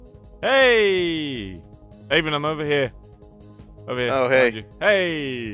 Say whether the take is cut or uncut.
uncut